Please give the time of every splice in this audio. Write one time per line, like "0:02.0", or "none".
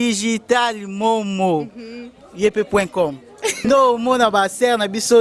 none